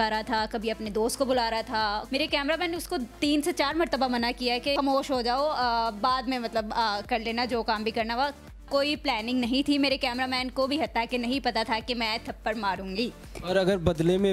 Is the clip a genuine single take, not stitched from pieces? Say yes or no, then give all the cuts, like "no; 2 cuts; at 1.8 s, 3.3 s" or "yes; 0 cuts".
no; 3 cuts; at 2.0 s, 4.7 s, 8.5 s